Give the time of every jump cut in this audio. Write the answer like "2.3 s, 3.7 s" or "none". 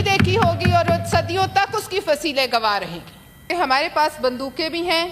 3.5 s

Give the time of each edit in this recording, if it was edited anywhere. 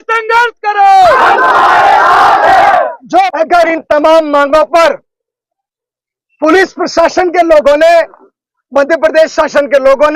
3.3 s

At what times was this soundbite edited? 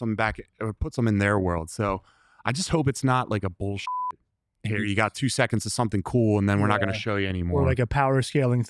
none

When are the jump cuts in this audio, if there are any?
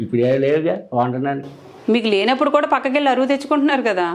none

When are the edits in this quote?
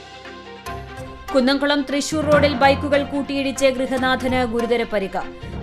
1.0 s

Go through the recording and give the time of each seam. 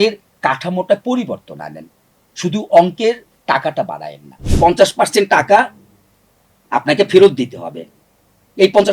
4.5 s

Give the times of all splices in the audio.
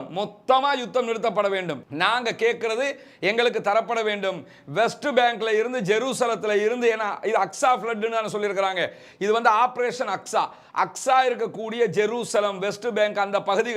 none

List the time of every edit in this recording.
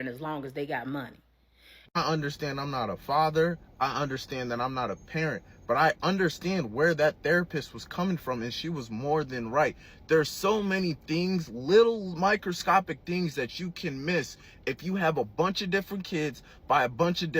1.8 s

